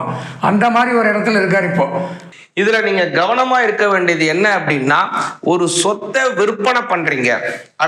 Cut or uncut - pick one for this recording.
cut